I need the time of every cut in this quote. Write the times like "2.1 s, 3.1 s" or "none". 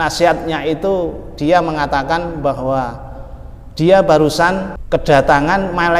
4.7 s